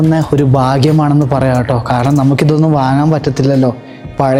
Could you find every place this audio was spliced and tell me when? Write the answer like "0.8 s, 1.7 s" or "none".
none